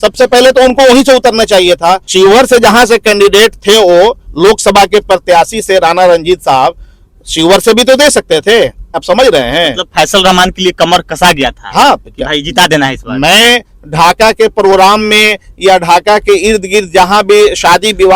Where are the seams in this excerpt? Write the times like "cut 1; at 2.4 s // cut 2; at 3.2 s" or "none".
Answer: cut 1; at 2.0 s // cut 2; at 9.0 s